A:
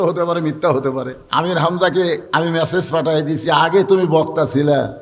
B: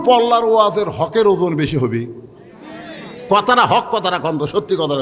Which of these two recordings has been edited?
A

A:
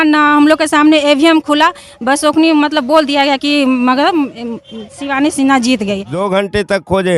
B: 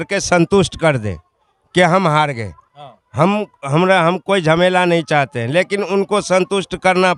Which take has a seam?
A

